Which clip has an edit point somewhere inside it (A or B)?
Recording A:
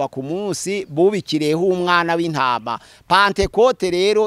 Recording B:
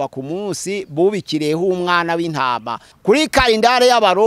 B